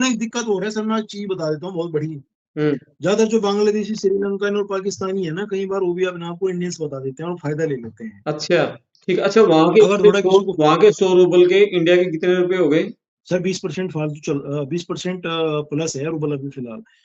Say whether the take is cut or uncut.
cut